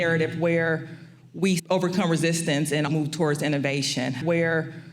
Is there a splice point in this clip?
yes; 3 cuts; at 1.6 s, 2.9 s, 4.2 s

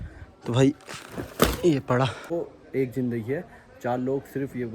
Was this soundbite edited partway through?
yes; 1 cut; at 2.3 s

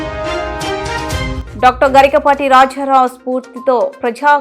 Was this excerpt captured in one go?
no; 1 cut; at 1.4 s

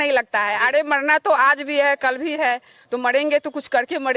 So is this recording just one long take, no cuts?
yes; 0 cuts

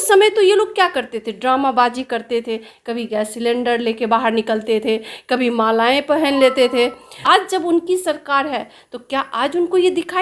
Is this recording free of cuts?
no; 1 cut; at 7.1 s

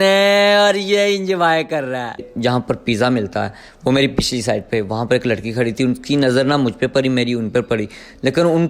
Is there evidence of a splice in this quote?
yes; 1 cut; at 2.3 s

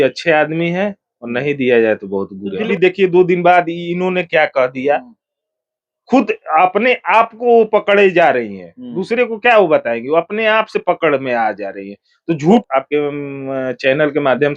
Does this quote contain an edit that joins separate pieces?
yes; 2 cuts; at 2.7 s, 12.7 s

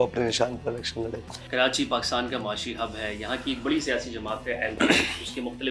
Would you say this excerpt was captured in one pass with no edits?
yes; 0 cuts

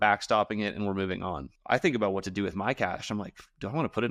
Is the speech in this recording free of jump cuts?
no; 1 cut; at 1.5 s

